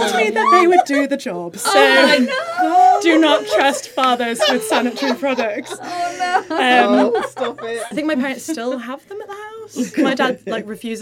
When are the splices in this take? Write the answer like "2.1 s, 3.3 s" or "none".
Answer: 7.8 s